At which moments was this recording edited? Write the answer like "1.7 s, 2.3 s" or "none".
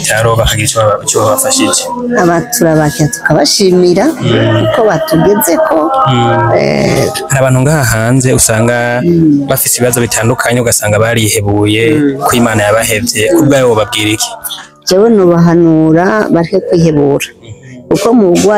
none